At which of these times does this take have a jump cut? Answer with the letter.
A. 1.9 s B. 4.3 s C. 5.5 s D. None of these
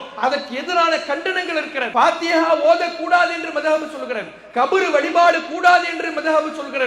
A